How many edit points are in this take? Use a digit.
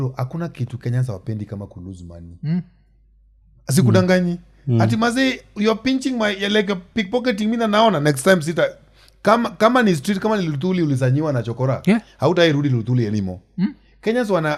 0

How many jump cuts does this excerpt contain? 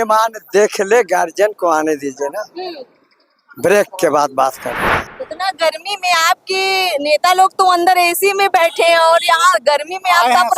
1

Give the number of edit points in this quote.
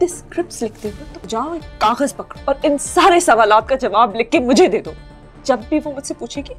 2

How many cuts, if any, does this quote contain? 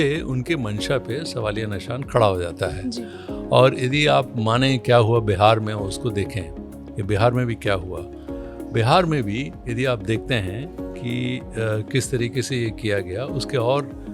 0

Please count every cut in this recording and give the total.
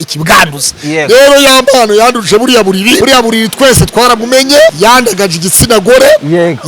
2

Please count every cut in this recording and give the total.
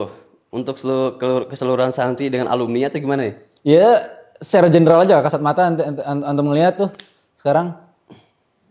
0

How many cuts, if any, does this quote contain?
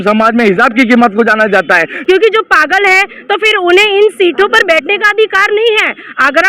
1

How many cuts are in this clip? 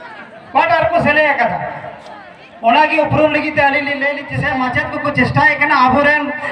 1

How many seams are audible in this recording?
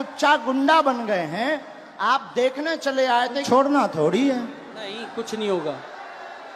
1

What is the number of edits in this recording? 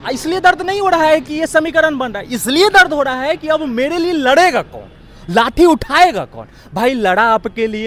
0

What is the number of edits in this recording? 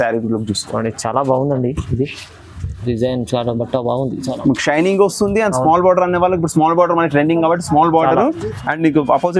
0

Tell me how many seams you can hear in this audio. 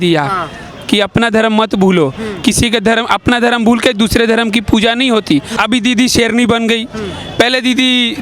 1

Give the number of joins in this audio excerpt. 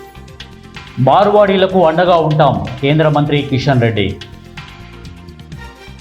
2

